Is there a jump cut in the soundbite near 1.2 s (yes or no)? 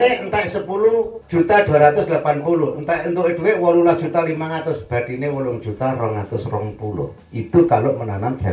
yes